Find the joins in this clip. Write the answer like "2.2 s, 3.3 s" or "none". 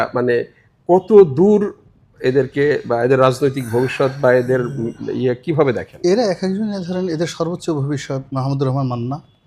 none

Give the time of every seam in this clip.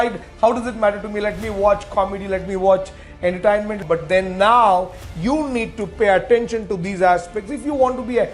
3.8 s

